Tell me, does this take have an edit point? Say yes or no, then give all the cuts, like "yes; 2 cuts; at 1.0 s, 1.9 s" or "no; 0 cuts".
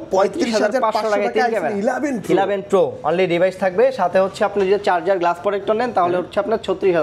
no; 0 cuts